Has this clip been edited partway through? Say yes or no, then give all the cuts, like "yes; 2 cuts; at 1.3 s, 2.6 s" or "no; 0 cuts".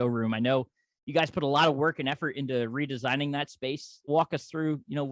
yes; 1 cut; at 4.1 s